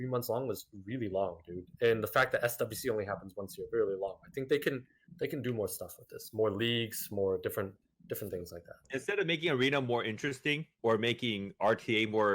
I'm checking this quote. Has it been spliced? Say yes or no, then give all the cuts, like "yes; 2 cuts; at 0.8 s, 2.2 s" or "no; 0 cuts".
yes; 2 cuts; at 8.8 s, 10.7 s